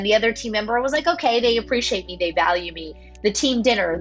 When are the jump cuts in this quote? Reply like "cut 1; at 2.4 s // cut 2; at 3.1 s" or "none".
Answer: none